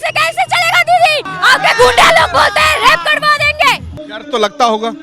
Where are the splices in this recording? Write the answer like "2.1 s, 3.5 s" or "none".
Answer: 1.3 s, 4.1 s